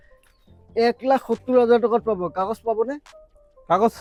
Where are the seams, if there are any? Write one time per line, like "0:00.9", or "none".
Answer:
none